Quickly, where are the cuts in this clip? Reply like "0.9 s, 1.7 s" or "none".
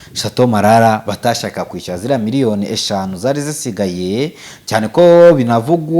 none